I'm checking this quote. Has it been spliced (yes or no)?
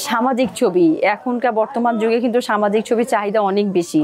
no